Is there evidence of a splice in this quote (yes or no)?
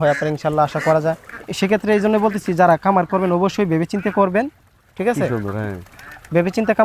yes